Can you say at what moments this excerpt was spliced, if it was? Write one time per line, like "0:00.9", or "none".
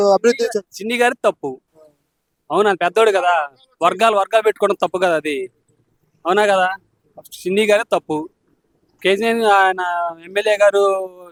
none